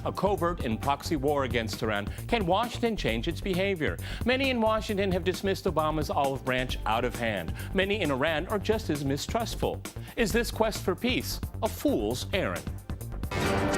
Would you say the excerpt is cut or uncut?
uncut